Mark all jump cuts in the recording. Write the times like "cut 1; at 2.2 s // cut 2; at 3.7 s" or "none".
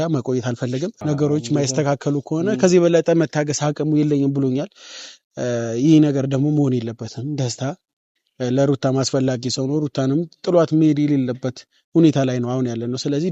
cut 1; at 1.0 s